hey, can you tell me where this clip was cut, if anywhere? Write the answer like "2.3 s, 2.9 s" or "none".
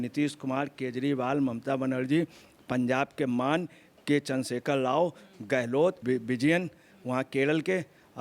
6.0 s